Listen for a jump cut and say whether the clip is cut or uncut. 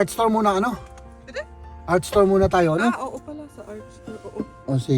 uncut